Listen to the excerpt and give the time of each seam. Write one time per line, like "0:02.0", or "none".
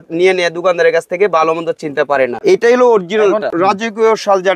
0:02.4
0:03.5